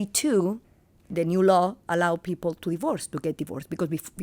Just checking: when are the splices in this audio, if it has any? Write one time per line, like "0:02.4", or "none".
0:01.0